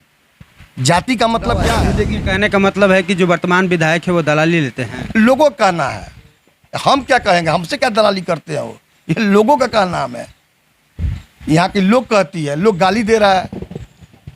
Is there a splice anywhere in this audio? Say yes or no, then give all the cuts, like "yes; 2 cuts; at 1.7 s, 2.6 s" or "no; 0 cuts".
yes; 1 cut; at 1.8 s